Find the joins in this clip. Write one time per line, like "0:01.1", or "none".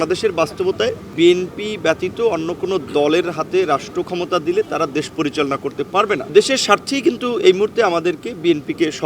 0:01.0
0:06.3